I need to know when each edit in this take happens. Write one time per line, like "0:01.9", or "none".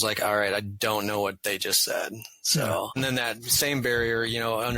0:03.0